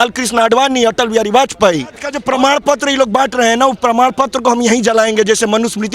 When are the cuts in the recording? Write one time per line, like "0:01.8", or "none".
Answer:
0:02.1